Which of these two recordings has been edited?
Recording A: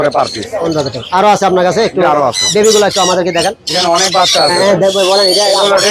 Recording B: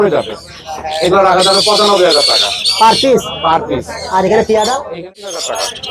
B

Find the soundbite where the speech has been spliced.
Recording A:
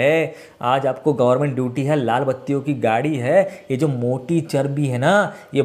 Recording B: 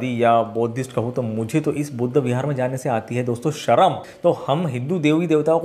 B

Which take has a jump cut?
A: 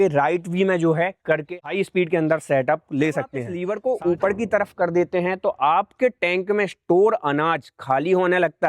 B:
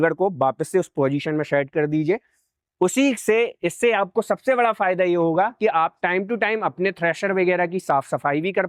A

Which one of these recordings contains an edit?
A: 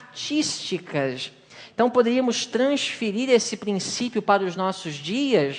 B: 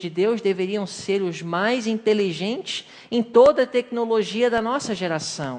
A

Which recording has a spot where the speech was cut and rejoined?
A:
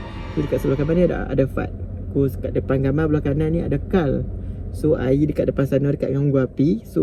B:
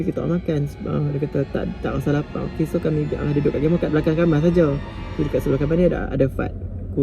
B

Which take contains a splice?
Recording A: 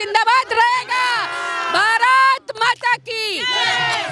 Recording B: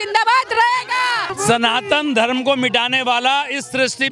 B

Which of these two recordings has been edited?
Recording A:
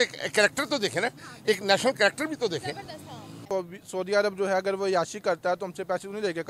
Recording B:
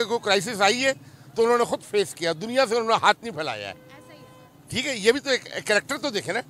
A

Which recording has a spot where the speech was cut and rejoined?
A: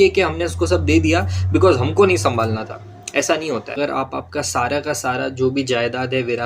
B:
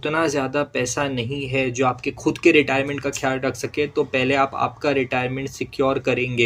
A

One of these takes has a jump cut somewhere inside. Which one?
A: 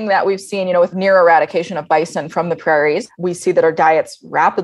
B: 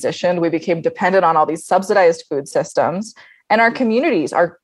A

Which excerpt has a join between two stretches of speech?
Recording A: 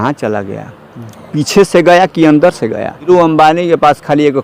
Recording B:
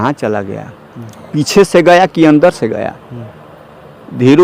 A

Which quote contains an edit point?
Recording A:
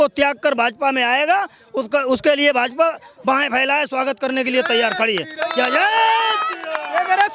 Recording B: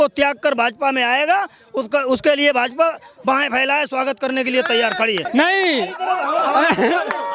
B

